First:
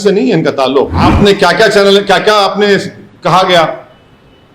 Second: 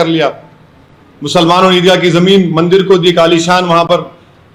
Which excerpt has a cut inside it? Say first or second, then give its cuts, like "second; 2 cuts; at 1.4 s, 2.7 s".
first; 1 cut; at 0.9 s